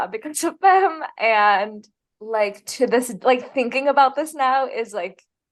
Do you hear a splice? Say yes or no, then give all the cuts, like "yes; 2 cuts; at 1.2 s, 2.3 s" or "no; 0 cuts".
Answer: no; 0 cuts